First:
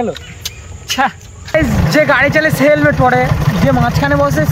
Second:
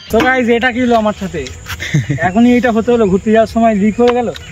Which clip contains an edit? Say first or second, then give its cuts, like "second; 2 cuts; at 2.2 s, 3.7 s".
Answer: first; 1 cut; at 1.5 s